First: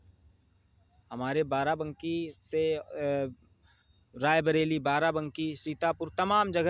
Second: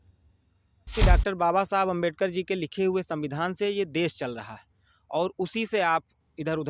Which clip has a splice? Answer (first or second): second